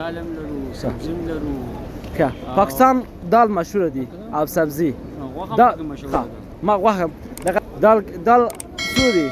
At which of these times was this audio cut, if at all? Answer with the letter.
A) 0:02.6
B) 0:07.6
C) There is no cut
B